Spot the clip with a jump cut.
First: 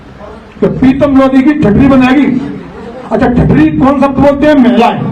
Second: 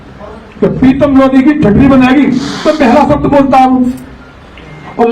second; 1 cut; at 2.6 s

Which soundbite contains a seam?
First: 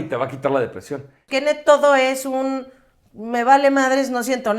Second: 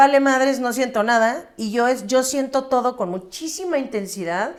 first; 1 cut; at 1.2 s

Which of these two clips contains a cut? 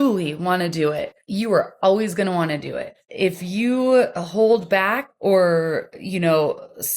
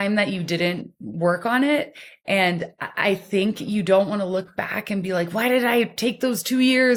first; 3 cuts; at 1.2 s, 3.0 s, 5.1 s

